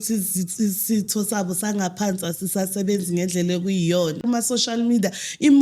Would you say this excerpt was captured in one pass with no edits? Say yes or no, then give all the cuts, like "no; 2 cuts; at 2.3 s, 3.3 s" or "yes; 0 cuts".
no; 1 cut; at 4.2 s